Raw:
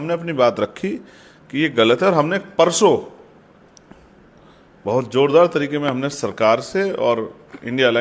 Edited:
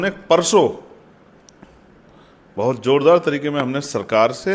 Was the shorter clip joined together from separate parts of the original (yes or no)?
no